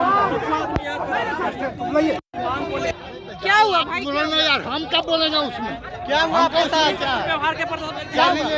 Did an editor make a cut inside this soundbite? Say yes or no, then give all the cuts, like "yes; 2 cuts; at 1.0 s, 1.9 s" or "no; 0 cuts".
no; 0 cuts